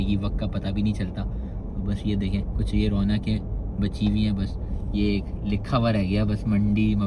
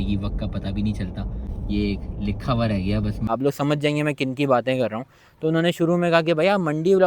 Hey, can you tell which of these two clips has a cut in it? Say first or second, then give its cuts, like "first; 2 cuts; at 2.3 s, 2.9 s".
second; 2 cuts; at 1.5 s, 3.3 s